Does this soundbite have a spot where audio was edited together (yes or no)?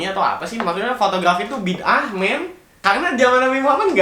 yes